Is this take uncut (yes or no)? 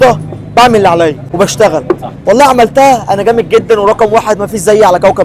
no